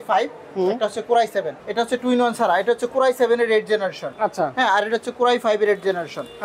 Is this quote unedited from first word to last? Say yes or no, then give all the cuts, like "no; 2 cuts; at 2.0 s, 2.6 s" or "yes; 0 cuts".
no; 1 cut; at 1.6 s